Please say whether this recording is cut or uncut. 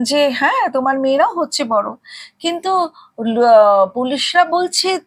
uncut